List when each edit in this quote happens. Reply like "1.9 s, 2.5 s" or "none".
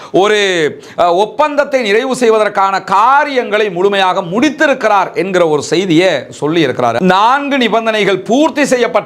7.0 s